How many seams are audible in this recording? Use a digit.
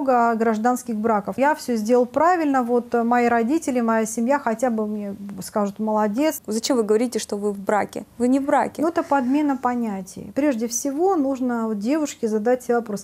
3